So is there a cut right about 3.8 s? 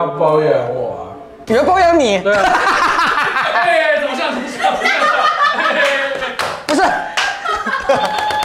no; 0 cuts

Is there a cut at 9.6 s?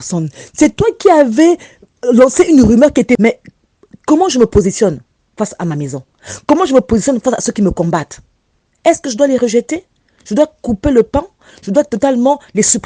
no; 1 cut; at 3.2 s

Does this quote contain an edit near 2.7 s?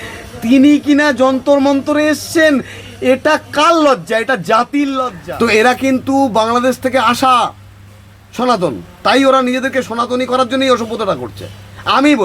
no; 1 cut; at 5.2 s

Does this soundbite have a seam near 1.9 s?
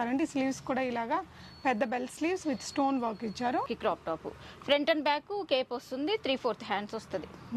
no; 1 cut; at 3.7 s

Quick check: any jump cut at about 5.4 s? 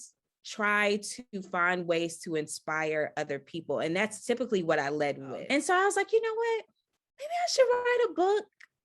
yes; 1 cut; at 5.4 s

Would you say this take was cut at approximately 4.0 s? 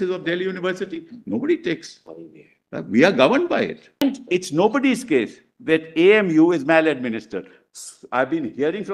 yes; 1 cut; at 4.0 s

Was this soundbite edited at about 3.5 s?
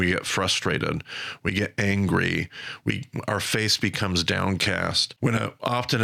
no; 1 cut; at 5.1 s

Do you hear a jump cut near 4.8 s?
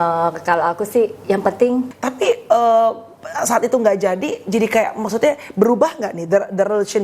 no; 1 cut; at 1.9 s

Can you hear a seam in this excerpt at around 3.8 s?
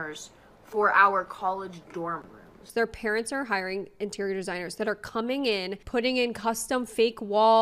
no; 2 cuts; at 2.6 s, 5.8 s

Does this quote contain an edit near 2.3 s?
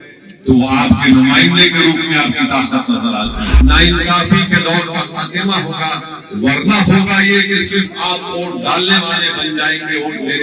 no; 1 cut; at 3.6 s

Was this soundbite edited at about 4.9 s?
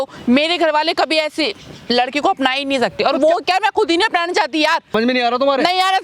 yes; 1 cut; at 4.9 s

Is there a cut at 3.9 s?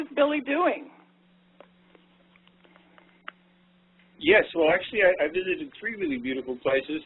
no; 0 cuts

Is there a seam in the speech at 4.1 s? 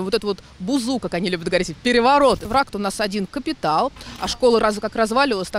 yes; 2 cuts; at 2.4 s, 4.1 s

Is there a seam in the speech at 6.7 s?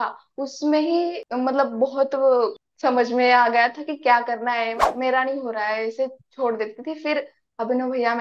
no; 3 cuts; at 1.2 s, 2.6 s, 4.9 s

